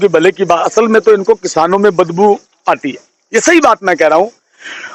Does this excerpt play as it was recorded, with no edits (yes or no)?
yes